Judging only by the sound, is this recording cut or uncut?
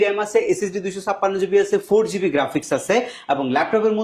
uncut